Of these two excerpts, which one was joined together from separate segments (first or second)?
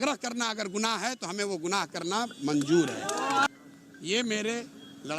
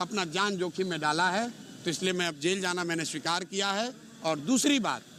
first